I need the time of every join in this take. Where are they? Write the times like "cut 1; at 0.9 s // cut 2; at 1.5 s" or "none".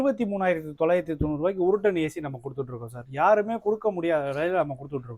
none

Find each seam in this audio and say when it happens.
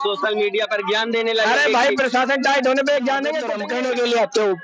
cut 1; at 3.5 s

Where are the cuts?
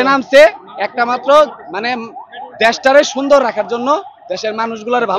none

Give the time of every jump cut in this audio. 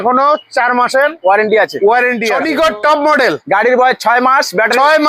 cut 1; at 2.3 s

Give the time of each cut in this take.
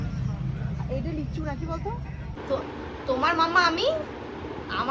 cut 1; at 2.4 s

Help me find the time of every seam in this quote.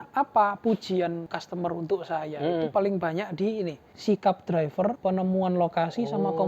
cut 1; at 1.3 s // cut 2; at 3.9 s // cut 3; at 5.0 s

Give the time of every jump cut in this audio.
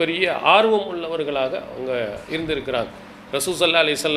none

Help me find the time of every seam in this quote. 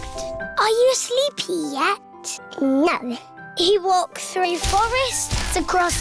cut 1; at 2.9 s

